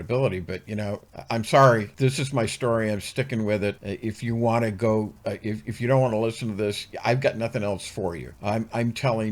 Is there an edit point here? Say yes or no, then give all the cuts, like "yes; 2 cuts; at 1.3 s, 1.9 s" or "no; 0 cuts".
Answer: yes; 4 cuts; at 1.1 s, 1.9 s, 3.9 s, 8.3 s